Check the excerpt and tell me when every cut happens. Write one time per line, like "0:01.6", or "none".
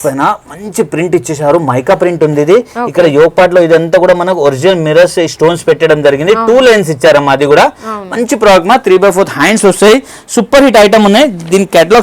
none